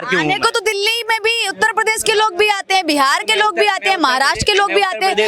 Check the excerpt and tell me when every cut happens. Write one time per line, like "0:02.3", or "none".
none